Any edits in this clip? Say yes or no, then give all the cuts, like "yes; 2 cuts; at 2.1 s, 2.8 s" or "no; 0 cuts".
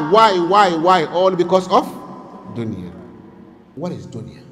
yes; 1 cut; at 3.6 s